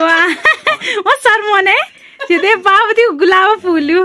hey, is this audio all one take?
yes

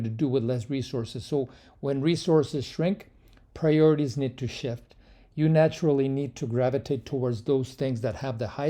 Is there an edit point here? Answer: no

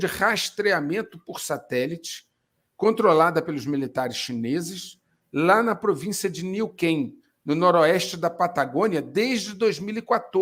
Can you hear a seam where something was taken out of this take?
no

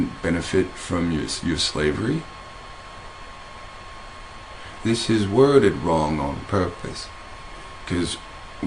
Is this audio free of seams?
no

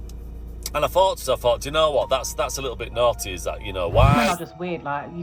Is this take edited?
yes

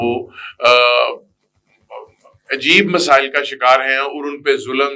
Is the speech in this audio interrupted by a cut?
no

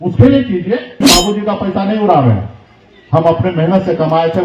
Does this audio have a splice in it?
yes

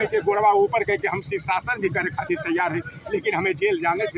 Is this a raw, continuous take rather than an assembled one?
yes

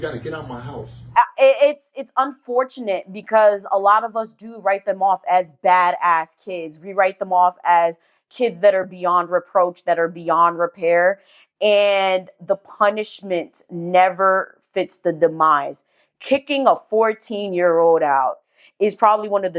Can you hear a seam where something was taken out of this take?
yes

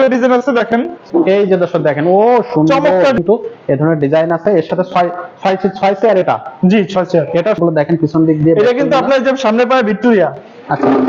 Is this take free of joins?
no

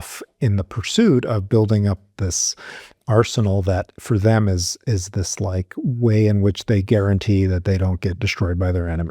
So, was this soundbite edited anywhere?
no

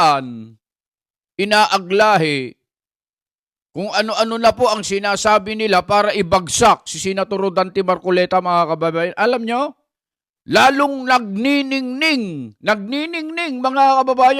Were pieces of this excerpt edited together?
no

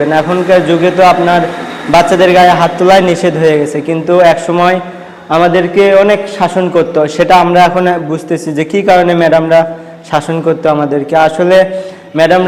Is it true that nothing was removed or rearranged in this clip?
yes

